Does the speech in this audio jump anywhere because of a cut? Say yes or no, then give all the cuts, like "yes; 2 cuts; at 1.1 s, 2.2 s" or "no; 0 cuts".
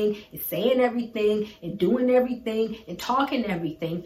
no; 0 cuts